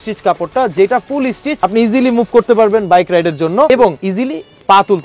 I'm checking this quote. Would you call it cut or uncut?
cut